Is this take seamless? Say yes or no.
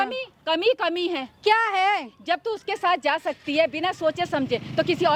yes